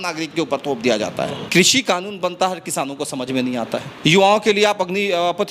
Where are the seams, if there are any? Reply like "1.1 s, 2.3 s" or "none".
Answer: 1.5 s

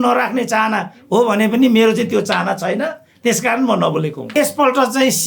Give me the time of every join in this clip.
4.3 s

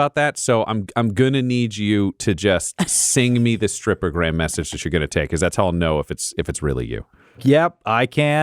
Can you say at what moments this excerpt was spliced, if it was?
7.4 s

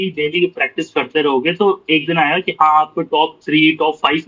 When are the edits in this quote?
none

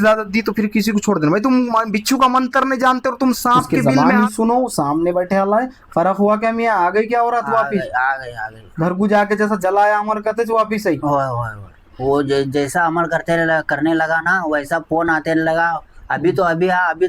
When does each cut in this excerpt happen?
4.1 s

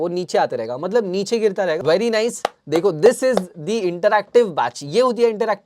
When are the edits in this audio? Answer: 1.8 s

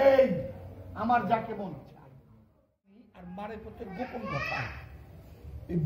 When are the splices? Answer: 3.1 s

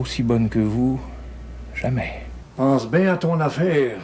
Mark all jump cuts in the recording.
2.3 s

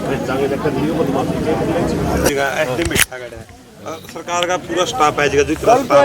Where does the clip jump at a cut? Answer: 2.3 s

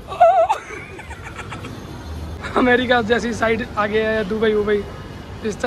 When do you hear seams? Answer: 2.4 s

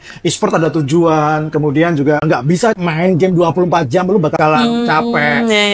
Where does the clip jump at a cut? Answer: 2.7 s, 4.3 s

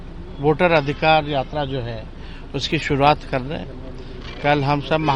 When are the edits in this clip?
none

